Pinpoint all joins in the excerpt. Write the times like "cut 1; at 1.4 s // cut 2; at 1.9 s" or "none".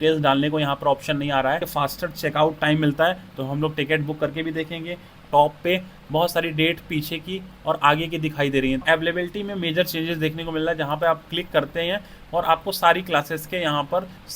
cut 1; at 1.7 s // cut 2; at 5.2 s // cut 3; at 8.8 s